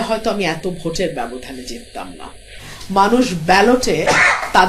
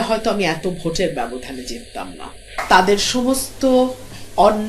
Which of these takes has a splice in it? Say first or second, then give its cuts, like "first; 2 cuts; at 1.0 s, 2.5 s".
second; 1 cut; at 2.5 s